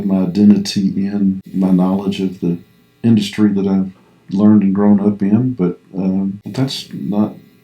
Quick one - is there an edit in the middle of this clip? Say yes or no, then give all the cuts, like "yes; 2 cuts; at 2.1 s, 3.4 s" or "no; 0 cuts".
yes; 2 cuts; at 1.5 s, 6.4 s